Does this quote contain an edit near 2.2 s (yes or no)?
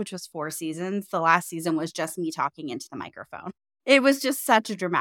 no